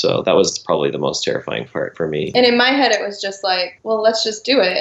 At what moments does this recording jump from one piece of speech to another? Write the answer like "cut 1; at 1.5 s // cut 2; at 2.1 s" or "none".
cut 1; at 2.2 s